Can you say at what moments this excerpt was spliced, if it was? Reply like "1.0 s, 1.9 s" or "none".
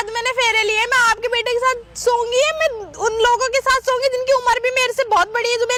none